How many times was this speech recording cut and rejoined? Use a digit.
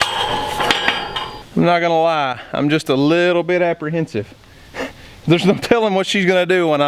1